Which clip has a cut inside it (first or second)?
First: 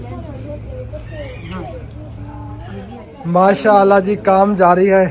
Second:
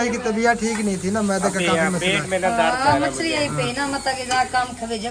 first